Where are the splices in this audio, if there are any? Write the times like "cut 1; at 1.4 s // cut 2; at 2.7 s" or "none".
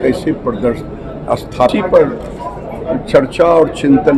cut 1; at 1.7 s